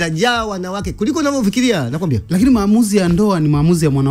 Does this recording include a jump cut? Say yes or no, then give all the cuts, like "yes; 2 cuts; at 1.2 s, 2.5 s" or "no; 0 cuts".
no; 0 cuts